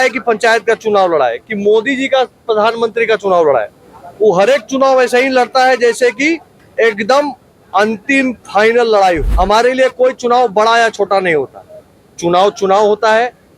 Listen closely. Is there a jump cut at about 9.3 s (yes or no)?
yes